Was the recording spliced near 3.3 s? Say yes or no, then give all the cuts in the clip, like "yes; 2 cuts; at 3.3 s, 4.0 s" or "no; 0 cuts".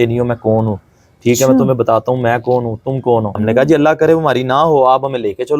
yes; 1 cut; at 3.3 s